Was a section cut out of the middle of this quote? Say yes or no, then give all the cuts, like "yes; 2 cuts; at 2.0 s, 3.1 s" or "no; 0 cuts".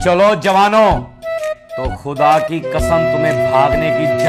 no; 0 cuts